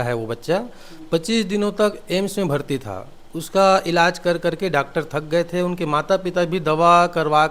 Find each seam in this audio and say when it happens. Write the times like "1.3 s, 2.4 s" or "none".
none